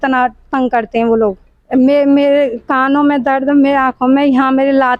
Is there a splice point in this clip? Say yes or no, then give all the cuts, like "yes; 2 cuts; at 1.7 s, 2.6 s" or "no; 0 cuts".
yes; 1 cut; at 1.5 s